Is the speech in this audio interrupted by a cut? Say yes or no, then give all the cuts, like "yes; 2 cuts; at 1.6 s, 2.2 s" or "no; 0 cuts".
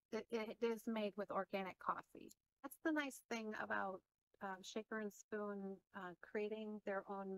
yes; 1 cut; at 2.7 s